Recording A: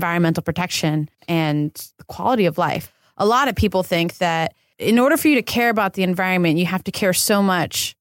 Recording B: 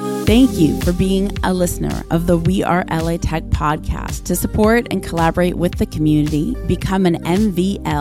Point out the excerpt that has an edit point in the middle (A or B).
A